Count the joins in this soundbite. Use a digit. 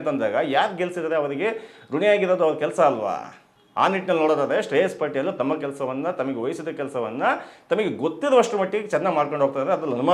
0